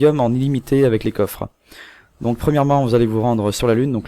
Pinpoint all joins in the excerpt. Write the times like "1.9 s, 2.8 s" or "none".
2.1 s